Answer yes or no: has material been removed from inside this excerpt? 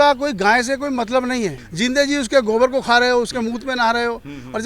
yes